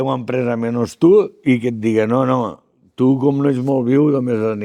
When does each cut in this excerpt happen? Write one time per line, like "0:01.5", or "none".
none